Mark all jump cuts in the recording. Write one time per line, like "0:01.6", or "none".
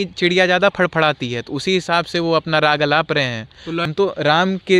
0:03.9